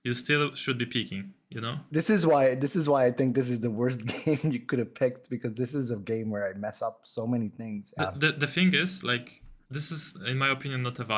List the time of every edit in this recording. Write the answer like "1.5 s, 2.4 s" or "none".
none